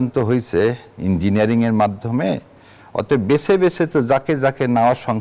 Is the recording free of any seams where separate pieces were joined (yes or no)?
yes